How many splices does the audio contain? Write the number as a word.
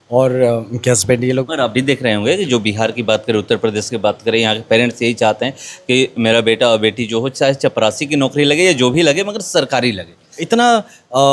two